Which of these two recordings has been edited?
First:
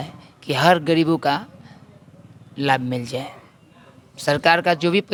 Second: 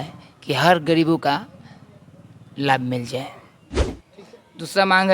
second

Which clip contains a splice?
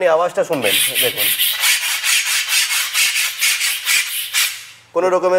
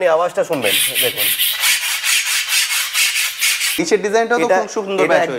second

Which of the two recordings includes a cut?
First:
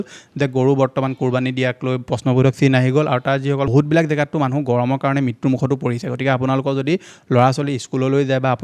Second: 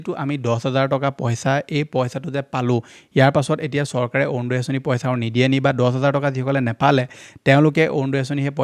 first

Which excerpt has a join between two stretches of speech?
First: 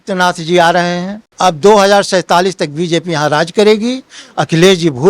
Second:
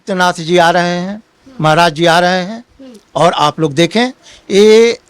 first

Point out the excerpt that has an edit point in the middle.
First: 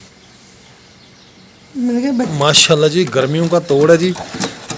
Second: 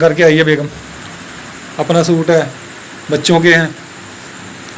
first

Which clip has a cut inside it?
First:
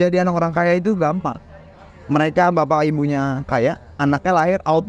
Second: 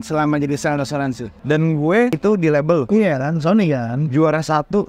second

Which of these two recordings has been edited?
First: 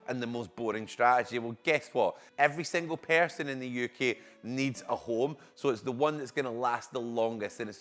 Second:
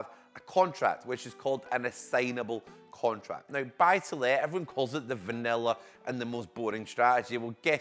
second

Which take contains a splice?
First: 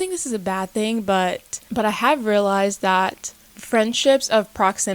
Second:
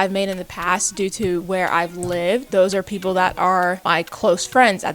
second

